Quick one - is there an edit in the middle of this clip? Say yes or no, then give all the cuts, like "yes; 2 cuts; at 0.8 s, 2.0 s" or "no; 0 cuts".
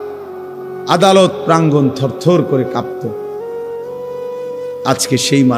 no; 0 cuts